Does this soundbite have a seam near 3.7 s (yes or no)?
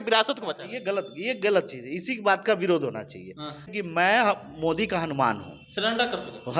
yes